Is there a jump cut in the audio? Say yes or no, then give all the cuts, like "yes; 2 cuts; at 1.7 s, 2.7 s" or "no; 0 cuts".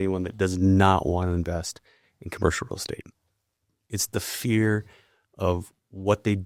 no; 0 cuts